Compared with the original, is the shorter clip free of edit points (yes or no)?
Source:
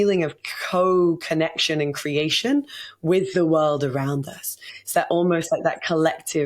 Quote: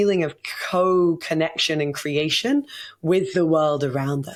yes